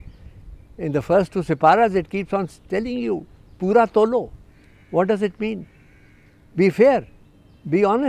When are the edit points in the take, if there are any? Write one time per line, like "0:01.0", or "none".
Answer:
none